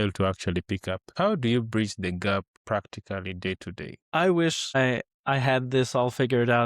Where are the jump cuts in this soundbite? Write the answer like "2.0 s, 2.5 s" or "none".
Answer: 1.1 s, 2.5 s, 3.9 s, 5.0 s